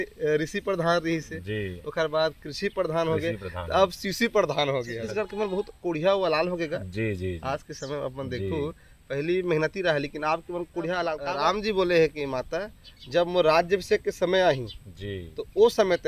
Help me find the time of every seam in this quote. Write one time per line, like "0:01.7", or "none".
0:05.0
0:11.2